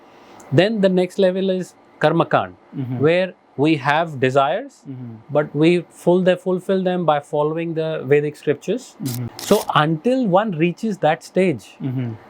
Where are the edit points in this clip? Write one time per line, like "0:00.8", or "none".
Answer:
0:09.3